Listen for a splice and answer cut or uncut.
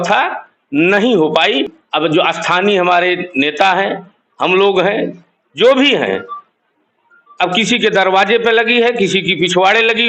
cut